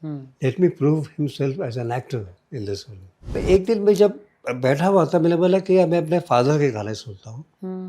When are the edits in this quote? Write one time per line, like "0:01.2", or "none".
0:03.3